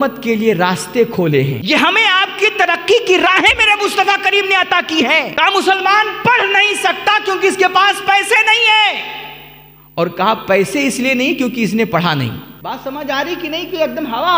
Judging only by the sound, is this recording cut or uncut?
cut